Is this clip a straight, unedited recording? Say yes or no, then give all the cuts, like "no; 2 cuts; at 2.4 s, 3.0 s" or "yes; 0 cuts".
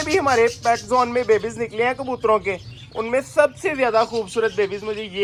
yes; 0 cuts